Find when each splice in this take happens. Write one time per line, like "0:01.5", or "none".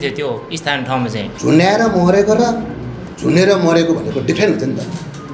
0:01.3